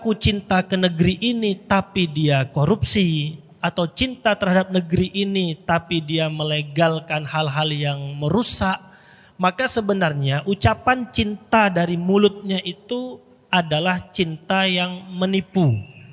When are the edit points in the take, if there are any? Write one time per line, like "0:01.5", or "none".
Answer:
none

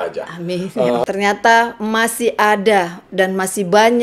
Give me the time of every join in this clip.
0:01.0

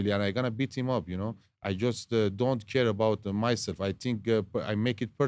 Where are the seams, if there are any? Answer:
none

